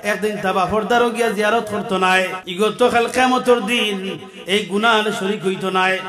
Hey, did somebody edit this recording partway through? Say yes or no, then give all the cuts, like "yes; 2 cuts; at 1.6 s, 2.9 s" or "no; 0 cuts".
yes; 1 cut; at 2.4 s